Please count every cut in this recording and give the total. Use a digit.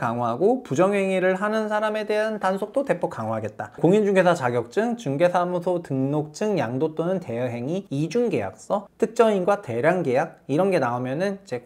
2